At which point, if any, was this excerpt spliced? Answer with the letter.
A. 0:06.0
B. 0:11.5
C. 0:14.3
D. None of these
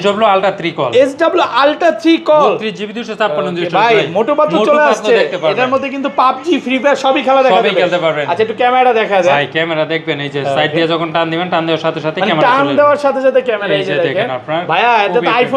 D